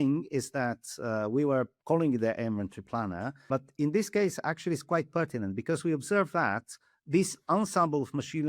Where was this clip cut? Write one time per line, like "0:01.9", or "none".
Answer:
0:01.8
0:03.5

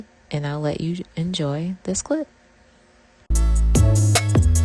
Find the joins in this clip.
0:03.3

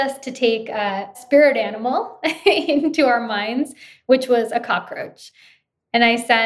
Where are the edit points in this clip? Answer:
0:01.1

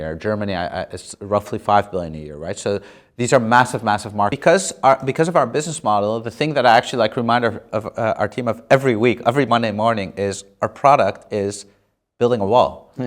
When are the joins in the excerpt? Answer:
0:04.3

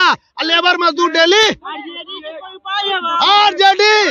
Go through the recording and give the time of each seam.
none

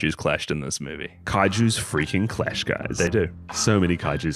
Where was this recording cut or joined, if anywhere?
0:03.1

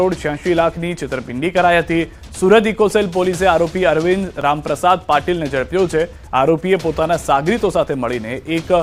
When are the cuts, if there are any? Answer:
none

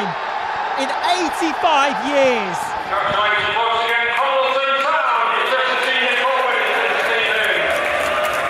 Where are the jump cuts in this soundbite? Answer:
none

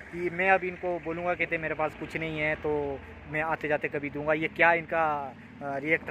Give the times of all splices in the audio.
none

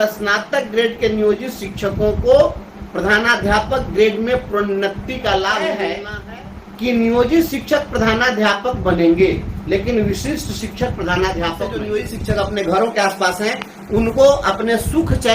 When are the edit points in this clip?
0:06.1
0:11.8

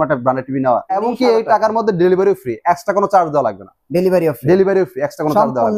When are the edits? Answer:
0:00.9

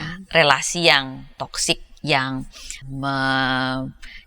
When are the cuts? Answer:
0:02.7

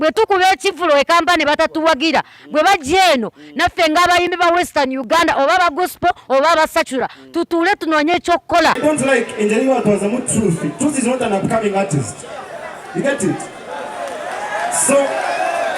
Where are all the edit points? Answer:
0:08.8

